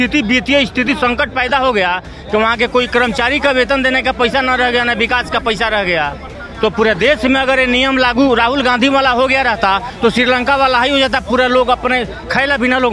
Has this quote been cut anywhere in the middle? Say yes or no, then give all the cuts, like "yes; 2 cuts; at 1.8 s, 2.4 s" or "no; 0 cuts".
no; 0 cuts